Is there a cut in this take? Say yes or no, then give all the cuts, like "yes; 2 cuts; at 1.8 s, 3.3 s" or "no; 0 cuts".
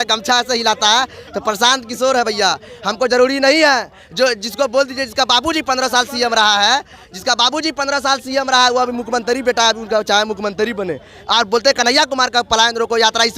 no; 0 cuts